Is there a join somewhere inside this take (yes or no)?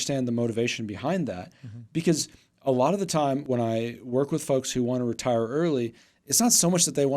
yes